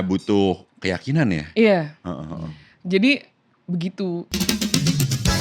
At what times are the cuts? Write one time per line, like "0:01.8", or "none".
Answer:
0:04.3